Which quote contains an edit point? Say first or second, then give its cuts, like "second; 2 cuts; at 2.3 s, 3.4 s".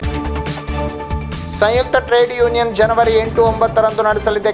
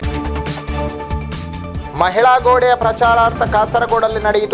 first; 1 cut; at 1.2 s